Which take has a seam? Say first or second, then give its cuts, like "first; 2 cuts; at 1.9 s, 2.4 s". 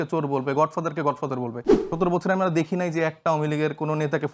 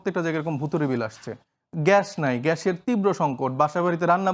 first; 1 cut; at 1.7 s